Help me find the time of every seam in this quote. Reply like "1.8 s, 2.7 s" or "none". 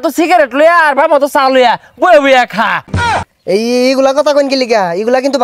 3.2 s